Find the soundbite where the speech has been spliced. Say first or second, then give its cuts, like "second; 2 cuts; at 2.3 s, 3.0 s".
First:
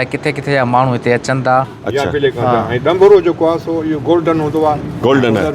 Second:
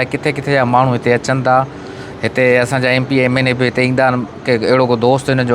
first; 1 cut; at 1.8 s